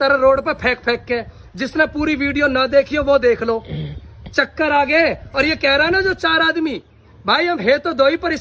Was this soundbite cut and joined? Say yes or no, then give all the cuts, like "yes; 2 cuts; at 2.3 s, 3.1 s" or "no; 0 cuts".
no; 0 cuts